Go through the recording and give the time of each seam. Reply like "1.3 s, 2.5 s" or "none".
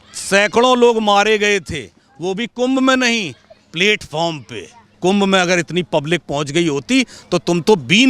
5.0 s